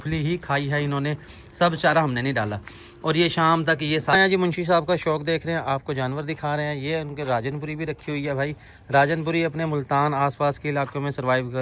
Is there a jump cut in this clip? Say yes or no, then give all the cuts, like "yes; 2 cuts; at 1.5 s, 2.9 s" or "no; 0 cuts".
yes; 1 cut; at 4.1 s